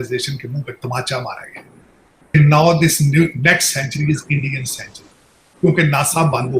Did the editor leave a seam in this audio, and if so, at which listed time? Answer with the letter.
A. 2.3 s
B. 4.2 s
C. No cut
A